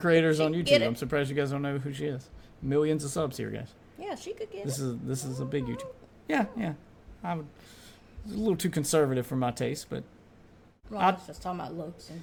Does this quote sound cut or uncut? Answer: uncut